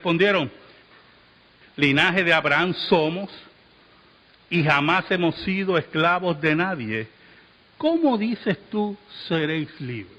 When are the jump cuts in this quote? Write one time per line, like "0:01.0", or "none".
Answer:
none